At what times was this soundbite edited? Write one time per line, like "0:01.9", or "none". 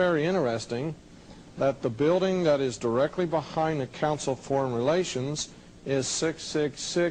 0:02.1